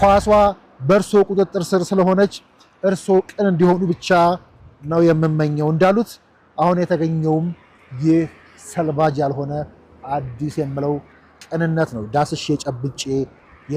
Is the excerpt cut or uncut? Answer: uncut